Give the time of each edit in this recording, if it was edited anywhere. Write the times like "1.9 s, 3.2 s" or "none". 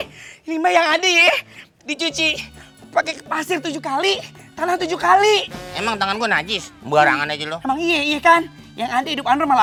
none